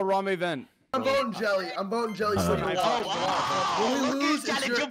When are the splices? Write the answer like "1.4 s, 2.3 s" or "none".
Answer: 0.9 s

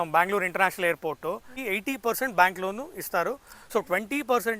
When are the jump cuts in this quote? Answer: 1.5 s

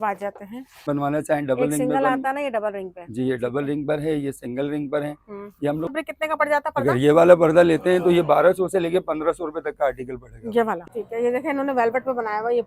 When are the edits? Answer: 0.9 s, 5.9 s, 10.8 s

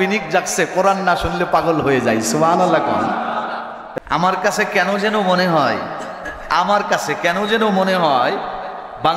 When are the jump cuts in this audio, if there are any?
3.8 s

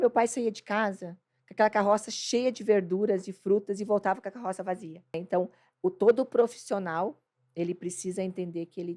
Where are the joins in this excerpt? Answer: 5.2 s

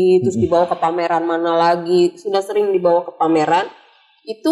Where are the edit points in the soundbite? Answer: none

